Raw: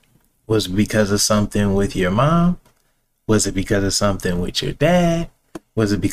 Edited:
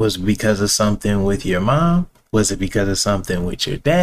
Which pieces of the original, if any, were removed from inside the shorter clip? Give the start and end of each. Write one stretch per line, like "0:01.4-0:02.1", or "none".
0:02.7-0:03.1